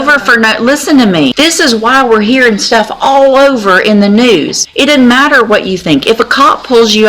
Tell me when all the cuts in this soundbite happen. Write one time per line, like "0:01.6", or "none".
0:01.3
0:04.6

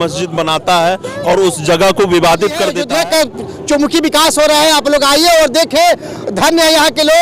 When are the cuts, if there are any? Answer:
0:02.8

